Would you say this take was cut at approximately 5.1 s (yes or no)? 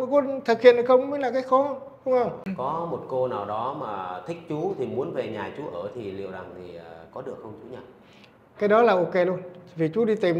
no